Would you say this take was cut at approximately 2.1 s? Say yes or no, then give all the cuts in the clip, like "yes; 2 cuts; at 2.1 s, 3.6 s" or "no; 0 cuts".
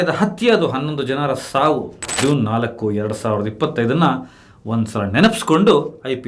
yes; 1 cut; at 2.1 s